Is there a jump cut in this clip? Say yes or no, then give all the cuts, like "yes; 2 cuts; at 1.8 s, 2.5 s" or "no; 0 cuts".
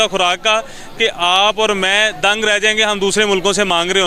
no; 0 cuts